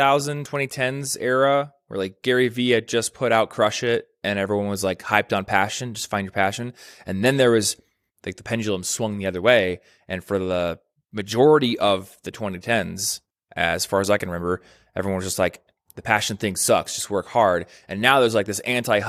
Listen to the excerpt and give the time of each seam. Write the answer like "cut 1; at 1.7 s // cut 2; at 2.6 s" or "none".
none